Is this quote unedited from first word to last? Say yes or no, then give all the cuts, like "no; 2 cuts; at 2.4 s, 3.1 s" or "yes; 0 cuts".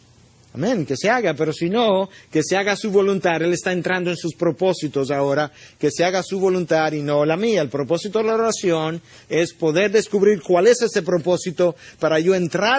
no; 1 cut; at 11.4 s